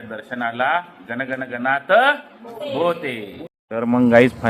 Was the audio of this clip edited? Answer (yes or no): yes